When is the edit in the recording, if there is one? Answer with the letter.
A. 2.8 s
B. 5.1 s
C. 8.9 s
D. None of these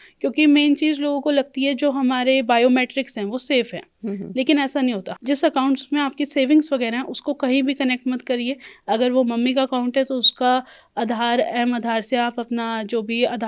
B